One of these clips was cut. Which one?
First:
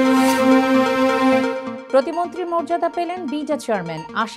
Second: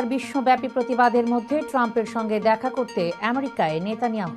first; 1 cut; at 1.7 s

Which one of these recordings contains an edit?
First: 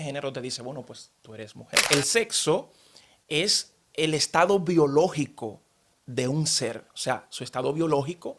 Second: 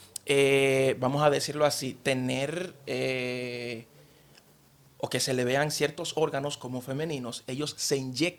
first; 1 cut; at 1.8 s

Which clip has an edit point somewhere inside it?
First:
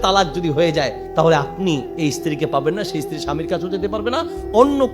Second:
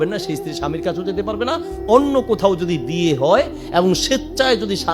first; 1 cut; at 1.0 s

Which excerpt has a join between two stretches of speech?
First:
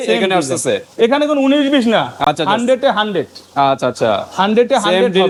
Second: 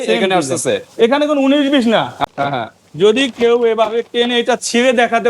second; 1 cut; at 2.2 s

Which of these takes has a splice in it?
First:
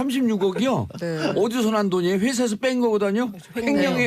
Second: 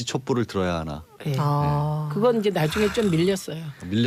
first; 1 cut; at 2.2 s

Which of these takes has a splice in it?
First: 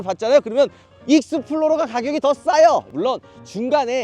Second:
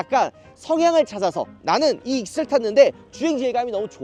first; 1 cut; at 2.9 s

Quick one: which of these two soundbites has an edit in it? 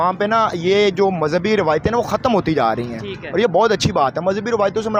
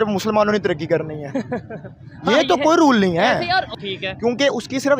second; 1 cut; at 3.8 s

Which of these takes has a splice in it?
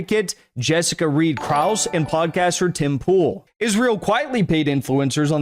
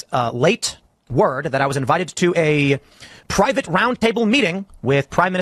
first; 1 cut; at 3.5 s

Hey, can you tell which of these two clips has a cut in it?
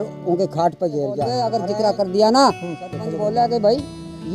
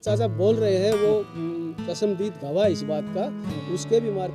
first; 2 cuts; at 1.4 s, 3.1 s

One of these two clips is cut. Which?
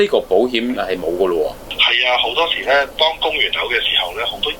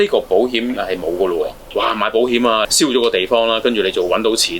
second; 2 cuts; at 1.6 s, 2.7 s

